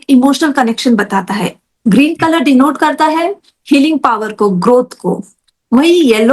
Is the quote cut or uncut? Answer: uncut